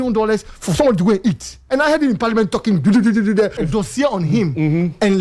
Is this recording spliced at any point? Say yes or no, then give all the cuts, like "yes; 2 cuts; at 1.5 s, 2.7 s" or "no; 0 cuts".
yes; 2 cuts; at 1.6 s, 3.6 s